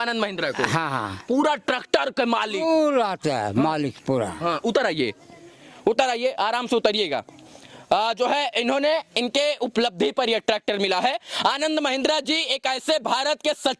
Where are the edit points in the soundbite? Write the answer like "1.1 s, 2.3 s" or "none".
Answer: none

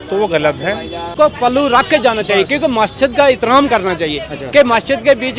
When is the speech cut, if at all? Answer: 1.1 s

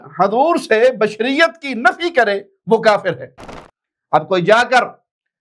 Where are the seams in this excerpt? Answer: 3.5 s

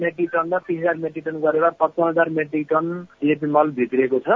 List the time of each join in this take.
none

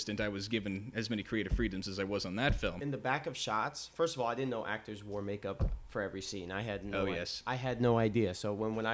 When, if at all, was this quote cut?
2.8 s

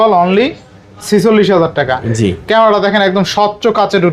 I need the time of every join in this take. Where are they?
none

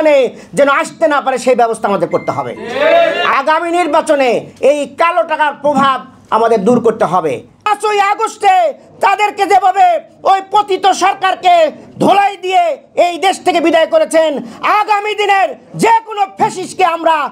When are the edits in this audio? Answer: 3.2 s, 7.7 s

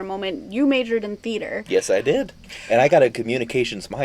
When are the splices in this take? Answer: 2.4 s

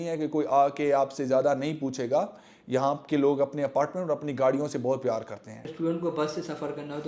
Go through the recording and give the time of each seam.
5.6 s

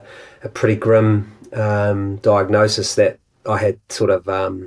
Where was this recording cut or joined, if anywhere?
none

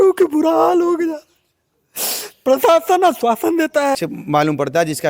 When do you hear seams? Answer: 4.0 s

